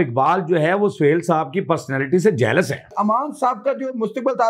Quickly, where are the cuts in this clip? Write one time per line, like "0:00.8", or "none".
0:02.9